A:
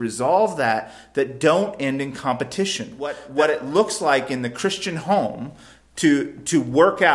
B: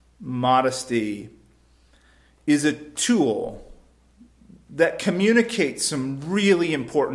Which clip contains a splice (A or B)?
A